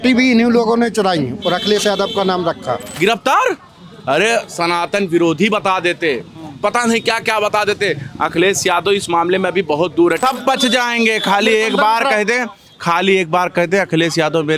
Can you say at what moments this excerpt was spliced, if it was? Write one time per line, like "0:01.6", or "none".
0:02.9
0:10.2